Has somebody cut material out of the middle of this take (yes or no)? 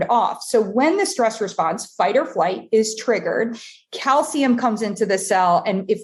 no